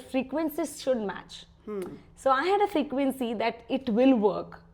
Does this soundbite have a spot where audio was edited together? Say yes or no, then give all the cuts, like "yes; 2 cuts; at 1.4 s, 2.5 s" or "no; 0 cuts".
no; 0 cuts